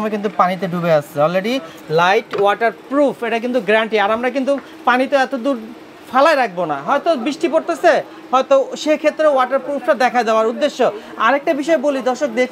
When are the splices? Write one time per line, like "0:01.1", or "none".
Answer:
none